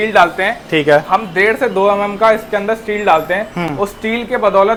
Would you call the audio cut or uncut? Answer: uncut